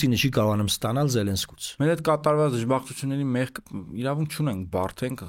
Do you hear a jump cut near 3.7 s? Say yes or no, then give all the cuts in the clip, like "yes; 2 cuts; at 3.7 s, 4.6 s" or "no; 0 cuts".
no; 1 cut; at 1.8 s